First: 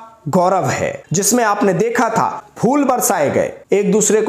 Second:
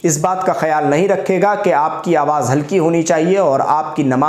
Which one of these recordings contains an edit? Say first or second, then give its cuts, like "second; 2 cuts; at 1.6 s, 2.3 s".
first; 2 cuts; at 1.0 s, 2.4 s